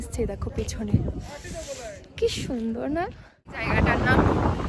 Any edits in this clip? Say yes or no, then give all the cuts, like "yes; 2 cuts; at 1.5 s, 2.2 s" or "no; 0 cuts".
yes; 1 cut; at 3.6 s